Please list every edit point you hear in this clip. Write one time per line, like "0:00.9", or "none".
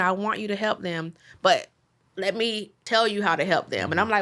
0:02.8